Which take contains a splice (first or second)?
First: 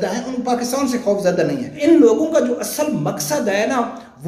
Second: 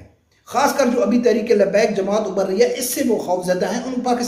first